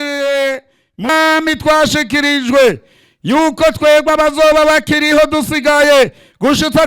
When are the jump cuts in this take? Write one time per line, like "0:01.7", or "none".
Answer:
0:01.1

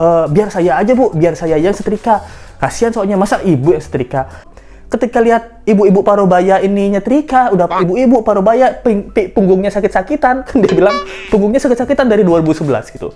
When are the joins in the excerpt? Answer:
0:04.5

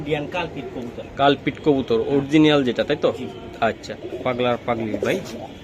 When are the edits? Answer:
0:03.9

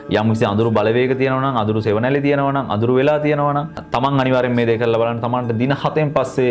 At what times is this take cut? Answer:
0:03.8

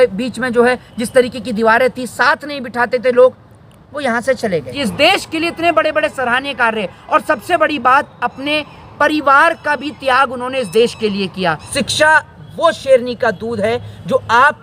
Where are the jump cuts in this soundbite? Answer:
0:04.8
0:11.7

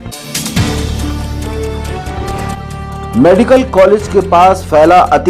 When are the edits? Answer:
0:02.5

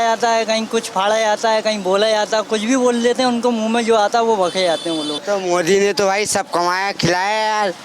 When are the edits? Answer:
0:05.2

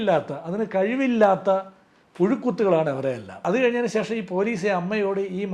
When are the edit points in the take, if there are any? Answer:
0:03.4

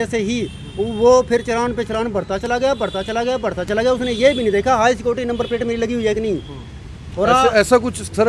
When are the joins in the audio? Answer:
none

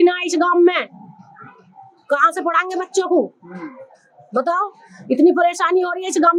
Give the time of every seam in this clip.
none

